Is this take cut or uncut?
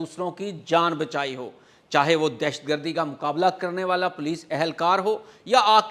uncut